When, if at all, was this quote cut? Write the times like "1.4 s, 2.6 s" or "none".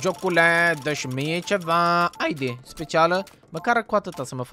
none